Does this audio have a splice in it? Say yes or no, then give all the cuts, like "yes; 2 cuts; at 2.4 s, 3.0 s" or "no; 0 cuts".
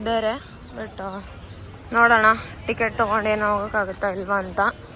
no; 0 cuts